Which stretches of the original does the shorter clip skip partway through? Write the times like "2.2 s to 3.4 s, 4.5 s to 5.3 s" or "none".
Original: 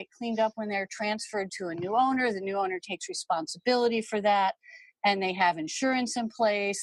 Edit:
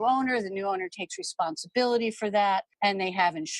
4.6 s to 4.9 s